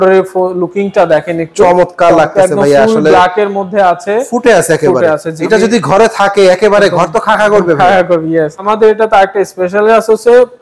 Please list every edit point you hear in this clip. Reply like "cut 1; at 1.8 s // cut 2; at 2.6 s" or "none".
cut 1; at 5.3 s // cut 2; at 8.7 s

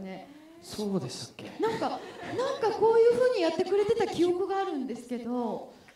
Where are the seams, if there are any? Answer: none

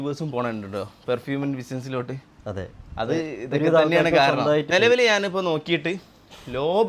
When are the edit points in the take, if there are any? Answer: cut 1; at 4.7 s

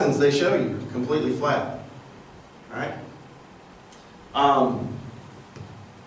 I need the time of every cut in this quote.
cut 1; at 2.9 s

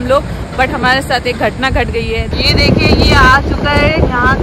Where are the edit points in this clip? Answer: cut 1; at 2.3 s

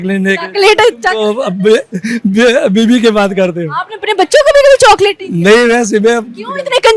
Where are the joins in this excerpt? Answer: none

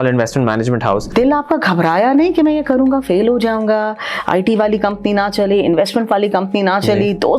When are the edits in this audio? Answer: cut 1; at 1.1 s

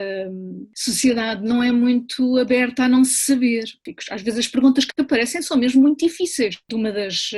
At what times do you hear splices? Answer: cut 1; at 3.7 s

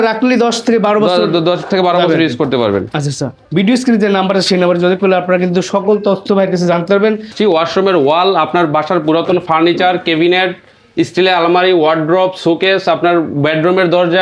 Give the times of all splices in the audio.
cut 1; at 3.4 s // cut 2; at 7.3 s

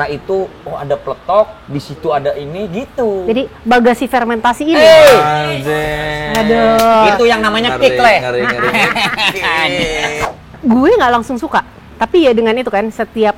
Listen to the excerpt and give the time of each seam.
cut 1; at 10.2 s

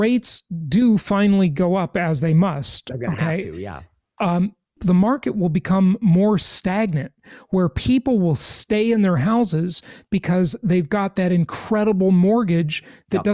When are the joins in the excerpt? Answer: none

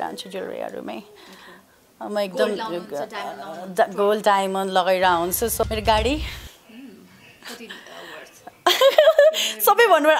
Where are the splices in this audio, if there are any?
cut 1; at 5.6 s

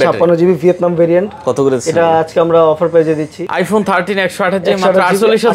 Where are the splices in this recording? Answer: cut 1; at 3.4 s

